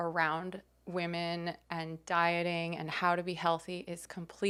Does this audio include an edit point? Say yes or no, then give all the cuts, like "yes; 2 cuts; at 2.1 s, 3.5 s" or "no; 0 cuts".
no; 0 cuts